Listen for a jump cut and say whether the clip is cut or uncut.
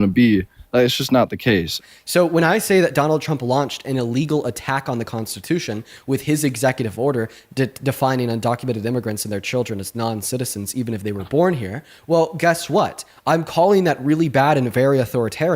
cut